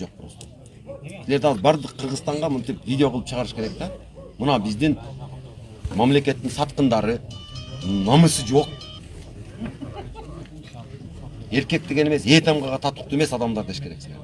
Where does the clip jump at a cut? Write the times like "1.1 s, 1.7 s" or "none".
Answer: none